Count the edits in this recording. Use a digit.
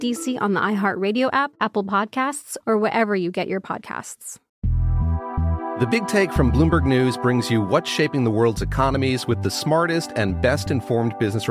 1